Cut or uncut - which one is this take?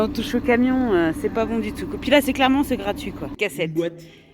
cut